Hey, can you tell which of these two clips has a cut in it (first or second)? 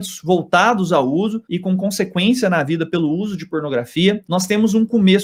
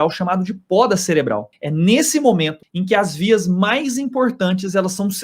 second